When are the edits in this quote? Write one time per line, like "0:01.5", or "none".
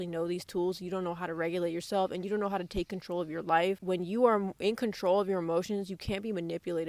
none